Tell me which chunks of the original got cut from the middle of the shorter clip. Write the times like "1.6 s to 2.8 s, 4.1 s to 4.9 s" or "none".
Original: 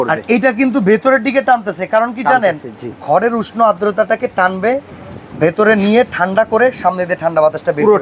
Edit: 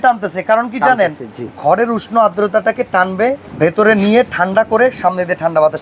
4.9 s to 5.3 s